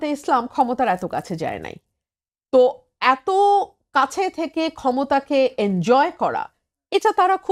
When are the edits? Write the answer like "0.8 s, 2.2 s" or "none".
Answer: none